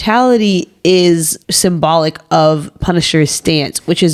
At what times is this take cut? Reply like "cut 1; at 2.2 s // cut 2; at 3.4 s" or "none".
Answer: none